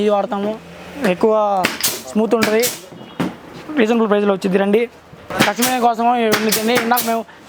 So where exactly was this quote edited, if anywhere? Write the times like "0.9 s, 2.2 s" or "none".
none